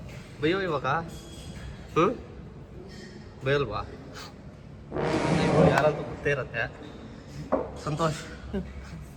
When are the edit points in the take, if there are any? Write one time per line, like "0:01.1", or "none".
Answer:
none